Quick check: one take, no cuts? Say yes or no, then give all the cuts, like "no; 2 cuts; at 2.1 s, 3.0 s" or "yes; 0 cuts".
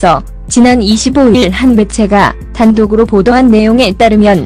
yes; 0 cuts